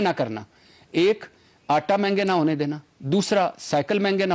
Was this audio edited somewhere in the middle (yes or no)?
no